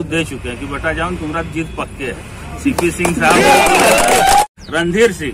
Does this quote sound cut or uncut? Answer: cut